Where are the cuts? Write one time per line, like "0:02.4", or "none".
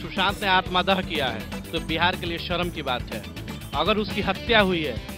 none